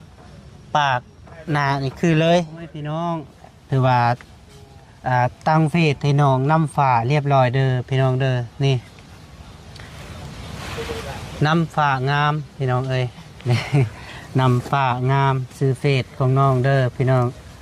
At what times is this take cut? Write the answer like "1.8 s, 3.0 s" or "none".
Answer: 3.0 s